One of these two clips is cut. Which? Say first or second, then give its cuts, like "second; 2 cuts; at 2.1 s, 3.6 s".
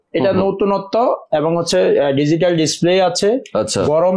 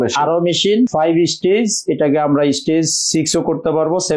second; 1 cut; at 0.9 s